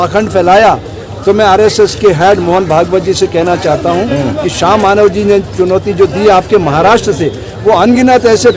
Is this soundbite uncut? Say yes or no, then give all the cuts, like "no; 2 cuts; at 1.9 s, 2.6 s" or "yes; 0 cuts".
yes; 0 cuts